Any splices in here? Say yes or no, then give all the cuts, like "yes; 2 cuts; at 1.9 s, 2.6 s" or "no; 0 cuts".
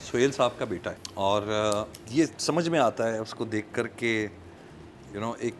yes; 2 cuts; at 1.0 s, 2.0 s